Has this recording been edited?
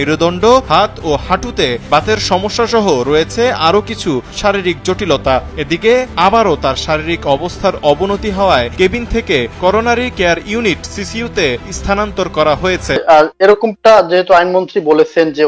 yes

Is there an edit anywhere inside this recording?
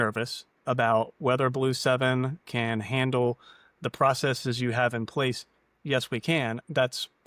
no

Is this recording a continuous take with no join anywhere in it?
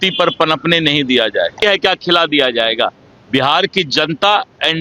no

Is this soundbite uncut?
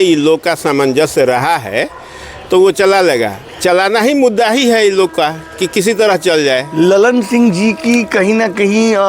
yes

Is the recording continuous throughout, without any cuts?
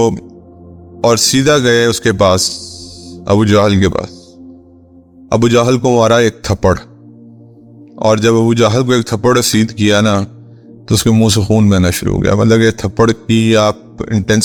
yes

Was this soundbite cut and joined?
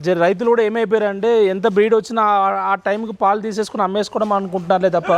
no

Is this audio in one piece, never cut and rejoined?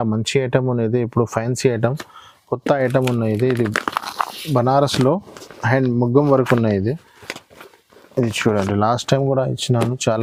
yes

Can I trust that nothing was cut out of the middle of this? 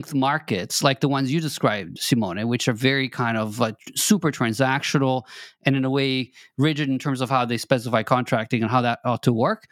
yes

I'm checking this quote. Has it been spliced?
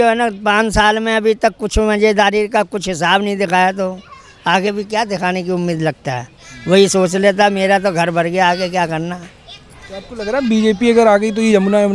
no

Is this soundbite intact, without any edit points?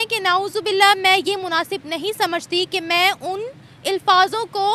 yes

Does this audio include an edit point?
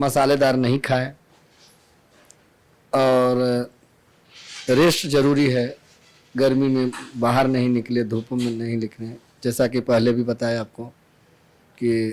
no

